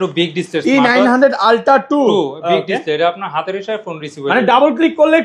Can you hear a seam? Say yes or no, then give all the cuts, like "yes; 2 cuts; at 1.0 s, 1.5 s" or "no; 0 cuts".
no; 0 cuts